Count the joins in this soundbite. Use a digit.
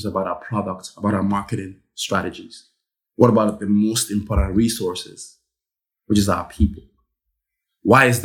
0